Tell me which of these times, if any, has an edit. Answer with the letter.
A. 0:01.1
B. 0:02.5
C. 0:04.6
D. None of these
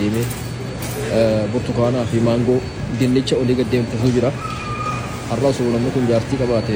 D